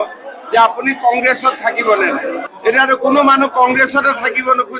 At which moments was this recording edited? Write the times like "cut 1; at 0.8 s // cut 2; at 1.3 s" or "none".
cut 1; at 2.5 s